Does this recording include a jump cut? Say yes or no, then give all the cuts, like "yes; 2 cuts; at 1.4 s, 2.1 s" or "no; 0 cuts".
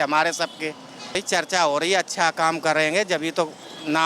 yes; 1 cut; at 1.2 s